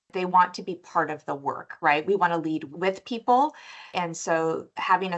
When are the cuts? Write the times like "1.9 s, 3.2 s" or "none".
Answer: 2.7 s, 3.9 s